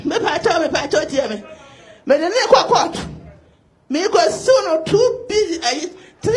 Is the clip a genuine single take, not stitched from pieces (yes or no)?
yes